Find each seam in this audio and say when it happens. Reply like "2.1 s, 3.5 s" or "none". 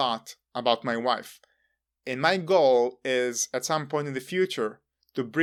none